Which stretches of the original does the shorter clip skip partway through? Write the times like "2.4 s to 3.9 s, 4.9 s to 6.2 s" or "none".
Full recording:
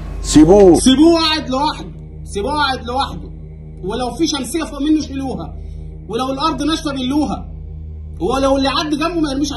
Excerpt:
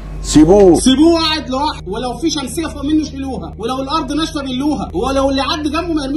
1.8 s to 3.8 s, 5.5 s to 6.0 s, 7.4 s to 8.1 s